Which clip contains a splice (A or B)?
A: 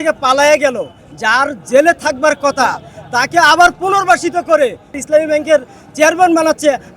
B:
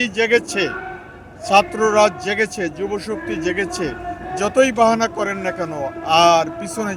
A